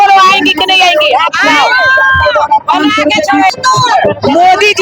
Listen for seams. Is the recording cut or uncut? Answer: cut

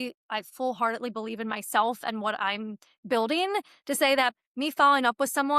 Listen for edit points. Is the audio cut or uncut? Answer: uncut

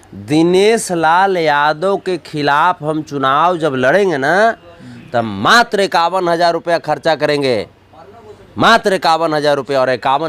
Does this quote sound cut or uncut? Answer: uncut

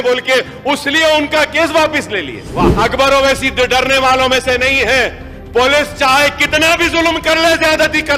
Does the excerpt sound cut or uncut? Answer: cut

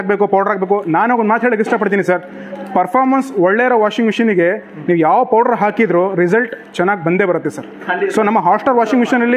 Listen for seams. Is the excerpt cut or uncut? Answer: uncut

